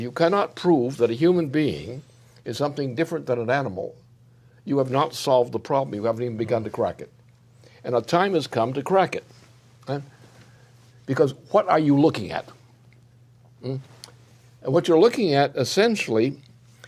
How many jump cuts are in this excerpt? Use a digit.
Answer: 0